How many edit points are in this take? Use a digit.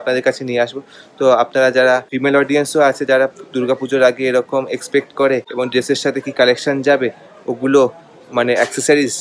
0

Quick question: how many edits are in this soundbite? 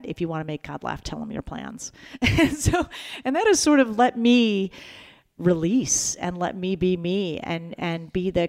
0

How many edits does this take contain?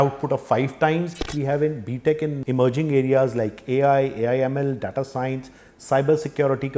2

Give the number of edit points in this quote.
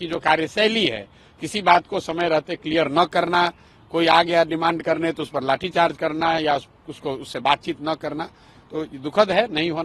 0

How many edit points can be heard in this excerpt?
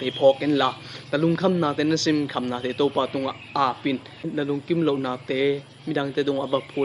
1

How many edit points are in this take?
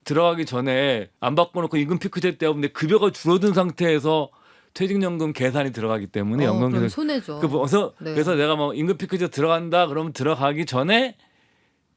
1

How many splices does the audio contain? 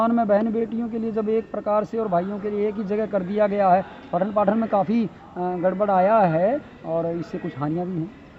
0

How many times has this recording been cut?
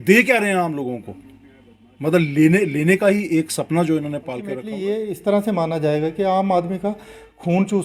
1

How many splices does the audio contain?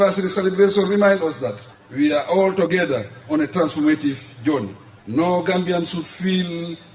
0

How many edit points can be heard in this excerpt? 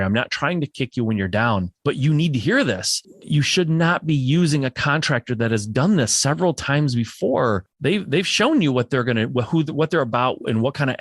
3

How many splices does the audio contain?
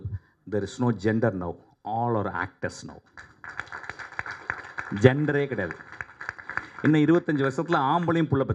0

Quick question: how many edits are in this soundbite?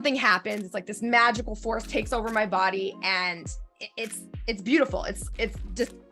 0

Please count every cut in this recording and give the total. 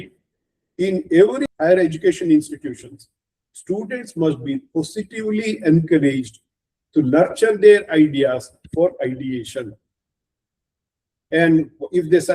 1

